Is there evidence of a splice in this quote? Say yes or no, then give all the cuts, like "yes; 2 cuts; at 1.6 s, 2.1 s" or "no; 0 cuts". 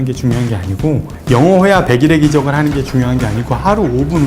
yes; 1 cut; at 1.1 s